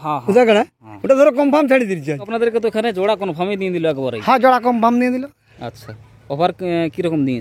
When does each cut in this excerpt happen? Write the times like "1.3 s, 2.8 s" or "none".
2.3 s